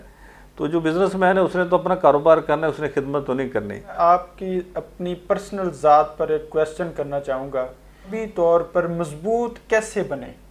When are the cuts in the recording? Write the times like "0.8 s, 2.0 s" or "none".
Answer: 3.9 s, 8.2 s